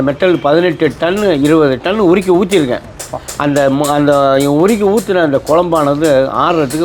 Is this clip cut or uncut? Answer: uncut